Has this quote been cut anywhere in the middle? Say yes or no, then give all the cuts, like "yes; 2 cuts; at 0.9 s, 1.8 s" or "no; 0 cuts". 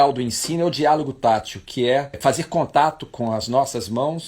yes; 1 cut; at 2.1 s